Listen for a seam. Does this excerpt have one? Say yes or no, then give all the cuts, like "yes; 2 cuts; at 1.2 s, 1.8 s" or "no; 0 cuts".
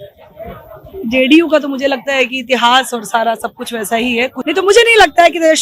yes; 1 cut; at 4.4 s